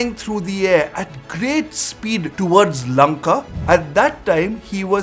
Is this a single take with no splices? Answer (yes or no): no